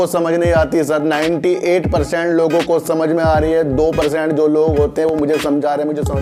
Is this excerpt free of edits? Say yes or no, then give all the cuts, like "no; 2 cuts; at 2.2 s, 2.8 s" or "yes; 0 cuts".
yes; 0 cuts